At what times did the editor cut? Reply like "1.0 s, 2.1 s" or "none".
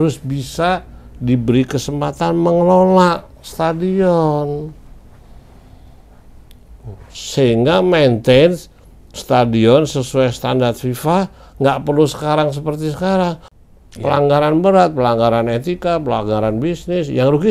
13.5 s